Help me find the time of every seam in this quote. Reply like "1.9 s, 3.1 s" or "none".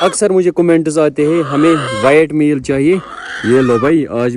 none